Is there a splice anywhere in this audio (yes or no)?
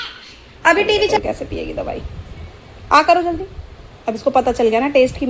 yes